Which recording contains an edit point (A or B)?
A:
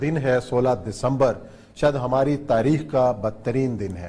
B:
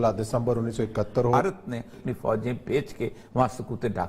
B